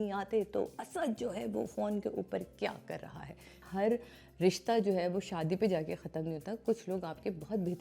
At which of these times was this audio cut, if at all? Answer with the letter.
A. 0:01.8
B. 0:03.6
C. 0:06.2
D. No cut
B